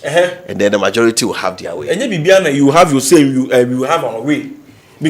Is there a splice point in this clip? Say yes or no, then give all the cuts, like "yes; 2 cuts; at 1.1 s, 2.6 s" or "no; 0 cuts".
no; 0 cuts